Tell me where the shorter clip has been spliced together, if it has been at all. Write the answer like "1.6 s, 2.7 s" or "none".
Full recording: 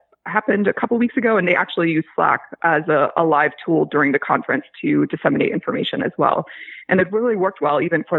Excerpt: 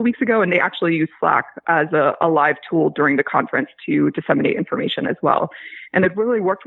none